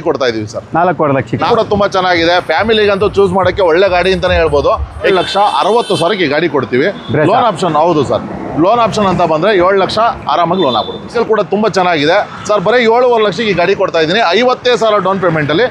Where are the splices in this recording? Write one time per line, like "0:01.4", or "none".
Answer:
0:01.5
0:05.1
0:11.1